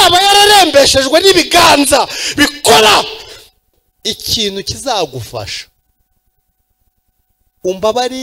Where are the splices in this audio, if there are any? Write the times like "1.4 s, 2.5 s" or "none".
3.9 s